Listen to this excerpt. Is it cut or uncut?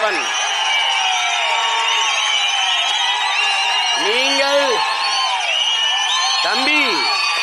uncut